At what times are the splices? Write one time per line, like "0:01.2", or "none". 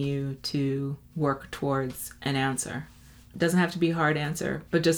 none